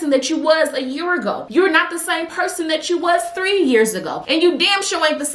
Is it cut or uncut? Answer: uncut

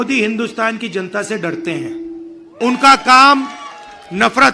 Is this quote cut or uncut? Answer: cut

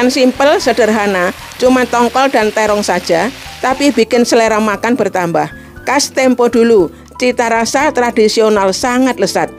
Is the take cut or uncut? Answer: uncut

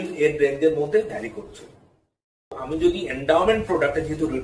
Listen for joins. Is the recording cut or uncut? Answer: cut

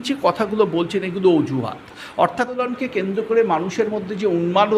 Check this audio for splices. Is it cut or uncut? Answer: cut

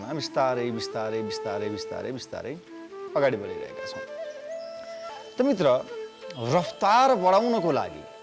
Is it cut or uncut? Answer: cut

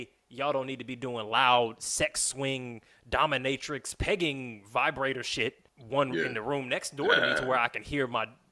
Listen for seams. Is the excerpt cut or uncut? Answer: cut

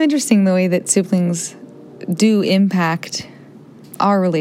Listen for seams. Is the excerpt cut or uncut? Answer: uncut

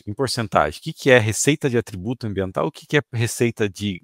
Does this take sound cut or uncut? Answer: uncut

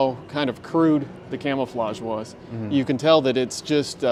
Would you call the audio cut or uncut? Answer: uncut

